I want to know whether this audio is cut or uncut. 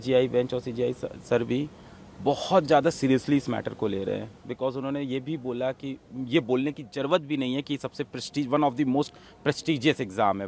uncut